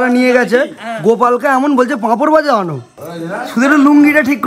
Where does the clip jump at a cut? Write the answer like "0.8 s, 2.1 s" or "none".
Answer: 2.9 s